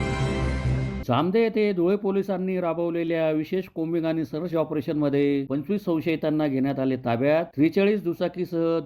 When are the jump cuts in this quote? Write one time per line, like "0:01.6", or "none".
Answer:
0:01.0